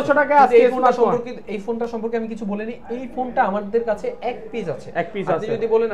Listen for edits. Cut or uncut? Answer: uncut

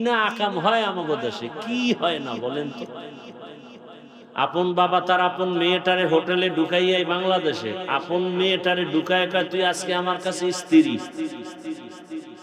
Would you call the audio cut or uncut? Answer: uncut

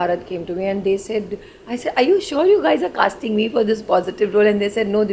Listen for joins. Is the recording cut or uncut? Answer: uncut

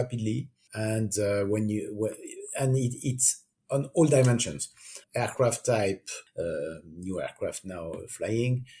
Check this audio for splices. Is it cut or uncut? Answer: cut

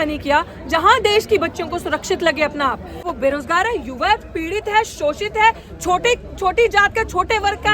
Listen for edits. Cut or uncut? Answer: cut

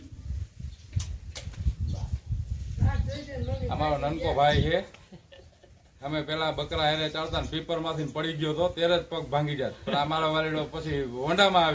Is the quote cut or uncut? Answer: uncut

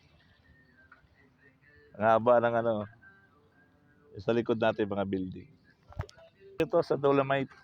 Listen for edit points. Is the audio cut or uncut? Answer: cut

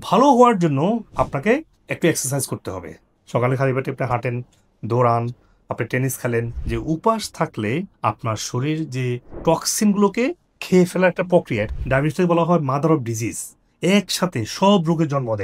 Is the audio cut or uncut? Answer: cut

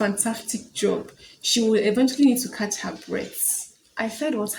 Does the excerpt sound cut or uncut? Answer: uncut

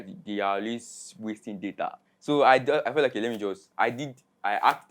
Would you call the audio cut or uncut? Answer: cut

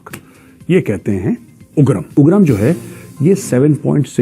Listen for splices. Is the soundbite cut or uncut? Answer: cut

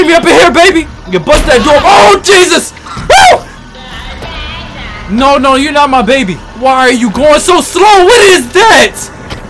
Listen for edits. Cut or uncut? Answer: cut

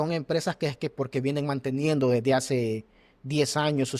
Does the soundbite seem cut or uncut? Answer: uncut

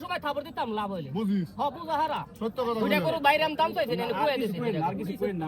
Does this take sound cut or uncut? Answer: uncut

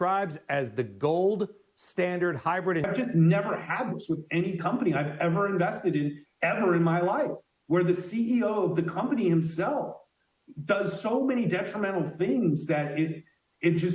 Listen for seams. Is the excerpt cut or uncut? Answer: cut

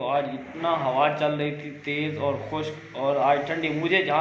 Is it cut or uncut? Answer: uncut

